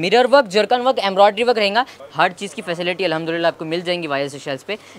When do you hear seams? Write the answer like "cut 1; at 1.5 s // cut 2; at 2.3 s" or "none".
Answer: cut 1; at 2.0 s